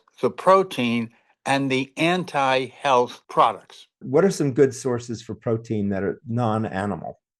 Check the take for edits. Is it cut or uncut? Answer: cut